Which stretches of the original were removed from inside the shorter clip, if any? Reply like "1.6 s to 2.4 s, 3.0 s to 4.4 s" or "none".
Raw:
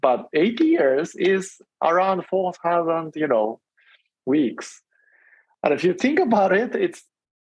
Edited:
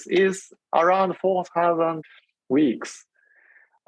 3.1 s to 3.8 s

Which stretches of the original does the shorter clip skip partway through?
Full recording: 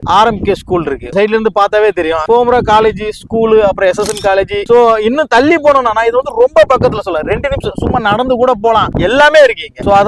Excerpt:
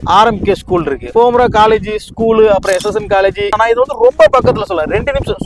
1.1 s to 2.2 s, 4.6 s to 5.9 s

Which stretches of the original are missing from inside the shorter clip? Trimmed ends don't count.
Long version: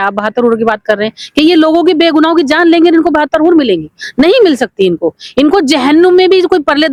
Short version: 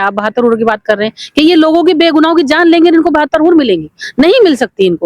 none

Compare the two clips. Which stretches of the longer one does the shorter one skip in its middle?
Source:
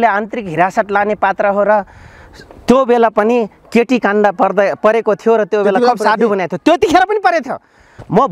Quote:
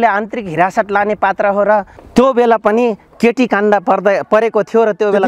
2.0 s to 2.5 s

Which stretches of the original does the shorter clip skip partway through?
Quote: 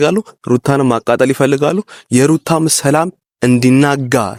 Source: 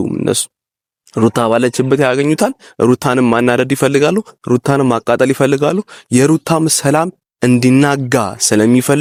none

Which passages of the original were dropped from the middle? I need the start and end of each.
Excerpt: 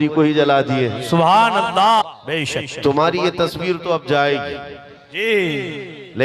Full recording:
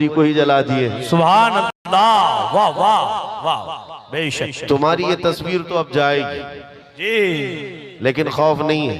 1.8 s to 3.7 s

